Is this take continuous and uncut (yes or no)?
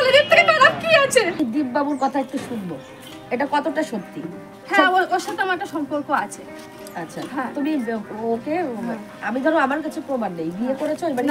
no